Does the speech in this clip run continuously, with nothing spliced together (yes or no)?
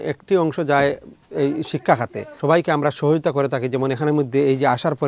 no